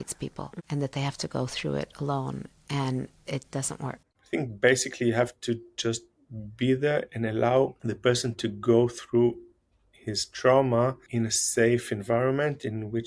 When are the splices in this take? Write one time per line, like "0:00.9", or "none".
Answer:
0:04.1
0:07.8
0:11.0